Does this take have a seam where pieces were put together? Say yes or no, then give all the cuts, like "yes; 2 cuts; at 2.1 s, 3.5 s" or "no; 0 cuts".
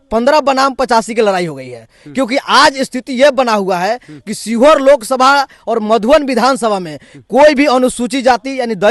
no; 0 cuts